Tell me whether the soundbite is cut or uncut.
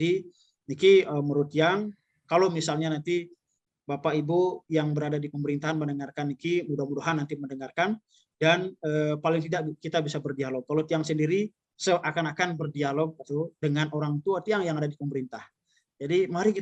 uncut